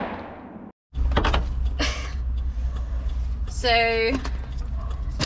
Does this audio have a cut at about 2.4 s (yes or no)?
no